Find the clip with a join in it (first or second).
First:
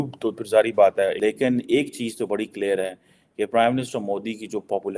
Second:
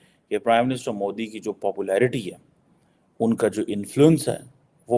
first